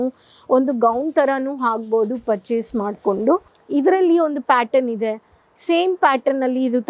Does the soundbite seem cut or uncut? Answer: cut